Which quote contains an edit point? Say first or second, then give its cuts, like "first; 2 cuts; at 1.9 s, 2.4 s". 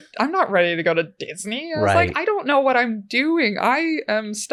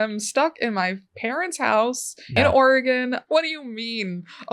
second; 2 cuts; at 2.4 s, 3.2 s